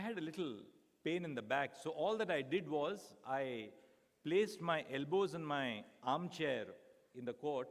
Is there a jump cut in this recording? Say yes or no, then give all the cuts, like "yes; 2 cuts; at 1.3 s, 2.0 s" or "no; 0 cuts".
no; 0 cuts